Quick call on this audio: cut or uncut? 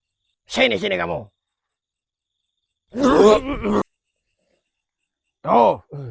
cut